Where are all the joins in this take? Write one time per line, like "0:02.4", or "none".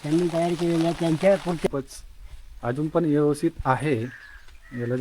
0:01.7